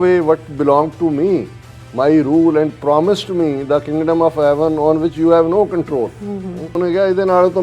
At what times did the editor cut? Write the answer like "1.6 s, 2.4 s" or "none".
6.7 s